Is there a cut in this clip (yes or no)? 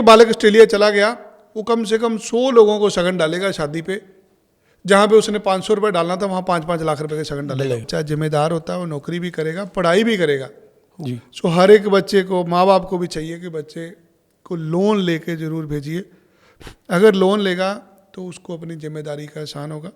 yes